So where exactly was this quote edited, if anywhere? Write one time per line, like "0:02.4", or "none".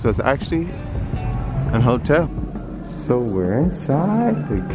0:02.3